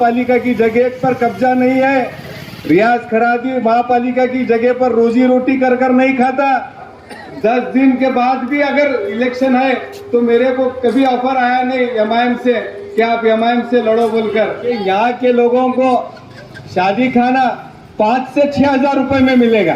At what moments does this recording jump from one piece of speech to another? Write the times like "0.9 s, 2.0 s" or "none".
6.8 s, 14.6 s